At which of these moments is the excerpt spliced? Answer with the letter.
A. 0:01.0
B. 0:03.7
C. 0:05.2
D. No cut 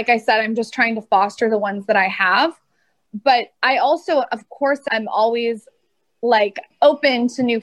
D